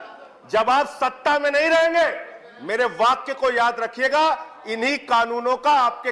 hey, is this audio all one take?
yes; 0 cuts

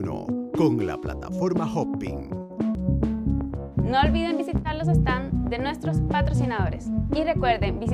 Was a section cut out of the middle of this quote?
yes; 1 cut; at 2.8 s

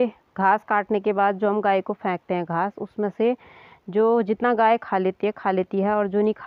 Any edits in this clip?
no; 0 cuts

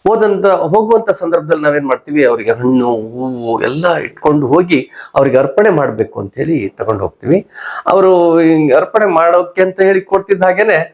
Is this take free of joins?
yes; 0 cuts

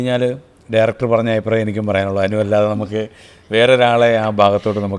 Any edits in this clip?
no; 0 cuts

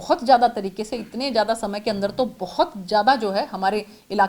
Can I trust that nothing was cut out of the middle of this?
yes; 0 cuts

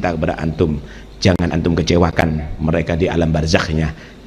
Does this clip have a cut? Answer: no; 0 cuts

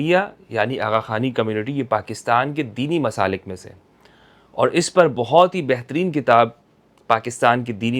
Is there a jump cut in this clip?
no; 0 cuts

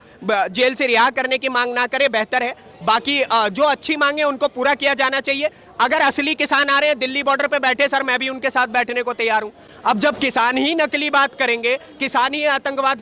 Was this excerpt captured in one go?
yes; 0 cuts

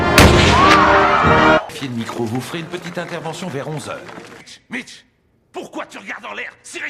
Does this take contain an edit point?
yes; 2 cuts; at 1.7 s, 4.4 s

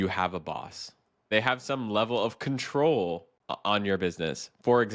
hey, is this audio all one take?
no; 2 cuts; at 1.3 s, 3.3 s

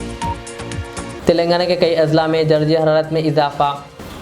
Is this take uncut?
no; 1 cut; at 1.1 s

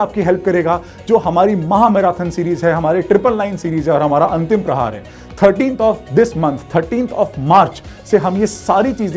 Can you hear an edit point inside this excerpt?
no; 0 cuts

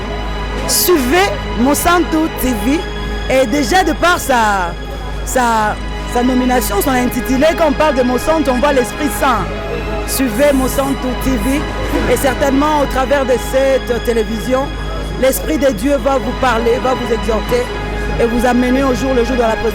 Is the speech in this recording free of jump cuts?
yes; 0 cuts

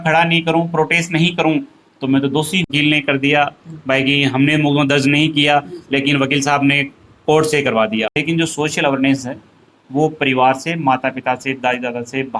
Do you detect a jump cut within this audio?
yes; 2 cuts; at 2.7 s, 8.2 s

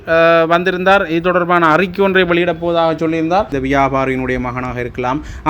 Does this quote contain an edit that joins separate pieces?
yes; 1 cut; at 3.5 s

